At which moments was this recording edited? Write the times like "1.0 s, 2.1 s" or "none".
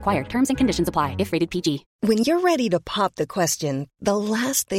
1.9 s